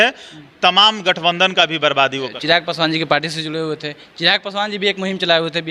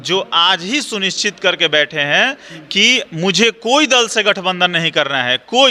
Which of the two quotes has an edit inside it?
first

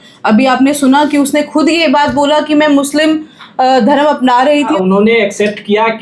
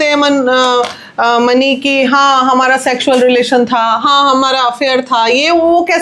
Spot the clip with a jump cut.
first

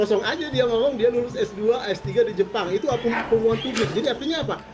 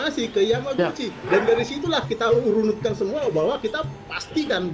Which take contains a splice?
second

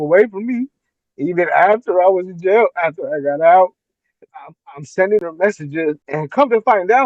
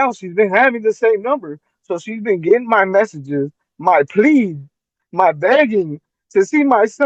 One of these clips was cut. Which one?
first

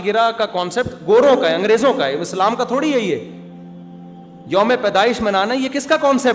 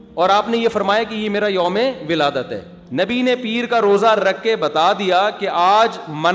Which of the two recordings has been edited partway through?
second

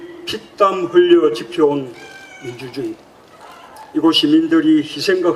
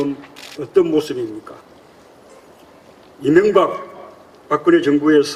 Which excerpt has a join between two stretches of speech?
first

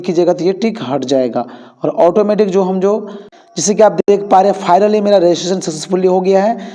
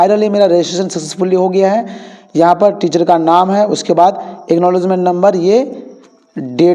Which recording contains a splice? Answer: first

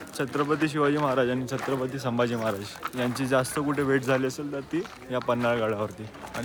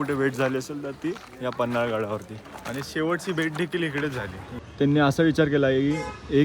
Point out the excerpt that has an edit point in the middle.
second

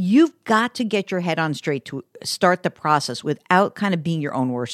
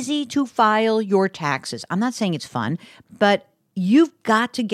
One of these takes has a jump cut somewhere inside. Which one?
second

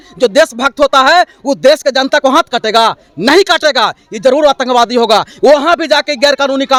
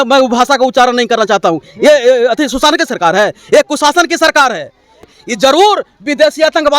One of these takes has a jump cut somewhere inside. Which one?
second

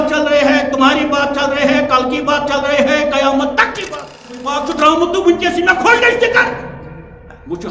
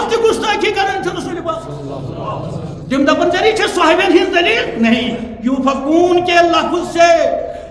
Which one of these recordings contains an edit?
first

